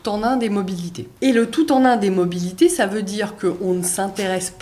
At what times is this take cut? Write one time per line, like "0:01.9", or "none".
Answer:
0:01.0